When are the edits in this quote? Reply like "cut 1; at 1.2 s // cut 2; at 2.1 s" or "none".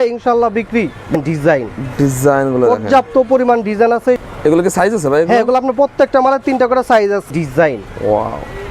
cut 1; at 1.1 s // cut 2; at 4.2 s // cut 3; at 7.3 s